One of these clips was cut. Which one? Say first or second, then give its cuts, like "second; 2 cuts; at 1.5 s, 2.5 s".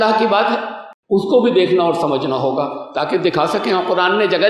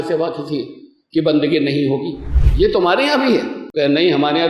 second; 1 cut; at 3.6 s